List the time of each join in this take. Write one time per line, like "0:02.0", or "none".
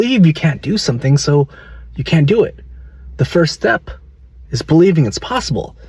none